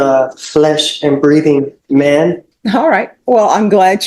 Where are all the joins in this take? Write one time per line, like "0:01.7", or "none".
0:02.5